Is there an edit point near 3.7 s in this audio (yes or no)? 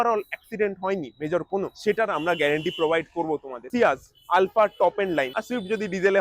yes